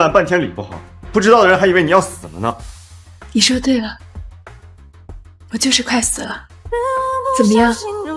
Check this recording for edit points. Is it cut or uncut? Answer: cut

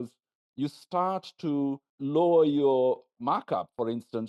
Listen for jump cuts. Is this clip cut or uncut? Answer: cut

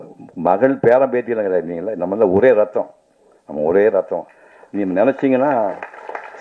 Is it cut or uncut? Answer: uncut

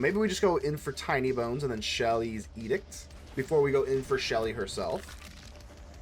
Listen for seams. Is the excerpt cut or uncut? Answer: uncut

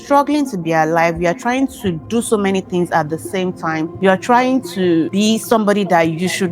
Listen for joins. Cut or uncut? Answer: cut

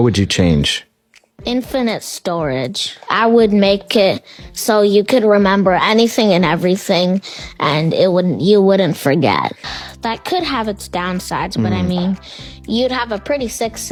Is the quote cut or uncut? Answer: uncut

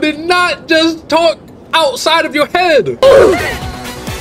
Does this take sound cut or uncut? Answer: cut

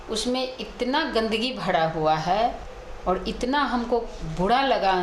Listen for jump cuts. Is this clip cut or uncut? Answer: cut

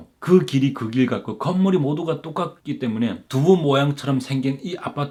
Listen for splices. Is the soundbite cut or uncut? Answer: uncut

